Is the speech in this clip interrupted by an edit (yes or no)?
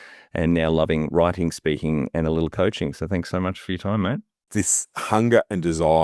yes